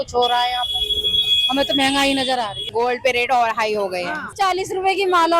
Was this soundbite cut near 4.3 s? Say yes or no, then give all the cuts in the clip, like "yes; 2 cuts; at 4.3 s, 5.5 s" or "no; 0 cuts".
yes; 2 cuts; at 2.7 s, 4.3 s